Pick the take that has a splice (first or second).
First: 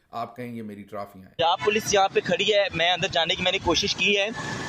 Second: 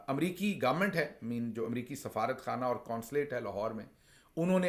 first